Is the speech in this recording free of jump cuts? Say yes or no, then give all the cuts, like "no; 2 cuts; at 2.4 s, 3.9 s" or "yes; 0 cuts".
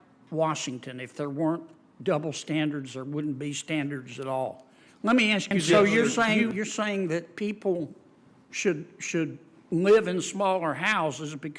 no; 1 cut; at 6.0 s